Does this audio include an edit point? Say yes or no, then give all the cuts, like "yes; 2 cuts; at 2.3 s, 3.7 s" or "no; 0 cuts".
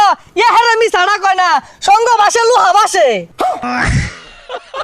yes; 1 cut; at 3.6 s